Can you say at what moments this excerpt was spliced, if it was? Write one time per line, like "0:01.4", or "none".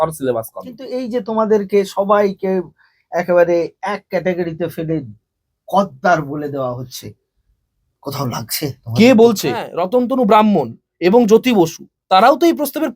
0:00.9
0:09.8